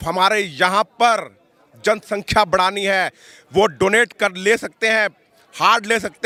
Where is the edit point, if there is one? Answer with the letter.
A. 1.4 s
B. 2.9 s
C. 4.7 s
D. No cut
D